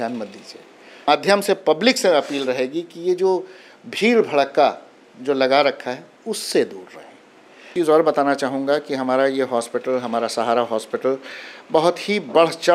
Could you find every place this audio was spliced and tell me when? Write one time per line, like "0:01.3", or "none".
0:01.0
0:07.7